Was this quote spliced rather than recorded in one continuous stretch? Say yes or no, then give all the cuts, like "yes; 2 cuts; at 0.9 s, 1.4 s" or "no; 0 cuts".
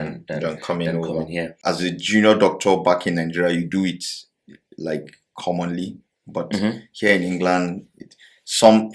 yes; 1 cut; at 1.6 s